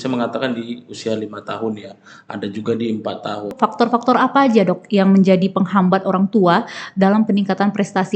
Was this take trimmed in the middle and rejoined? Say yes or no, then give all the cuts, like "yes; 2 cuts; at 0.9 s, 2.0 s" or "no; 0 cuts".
yes; 1 cut; at 3.5 s